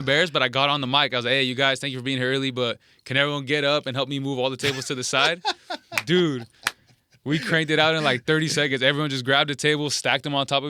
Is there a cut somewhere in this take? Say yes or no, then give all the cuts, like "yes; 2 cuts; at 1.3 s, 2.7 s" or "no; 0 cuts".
no; 0 cuts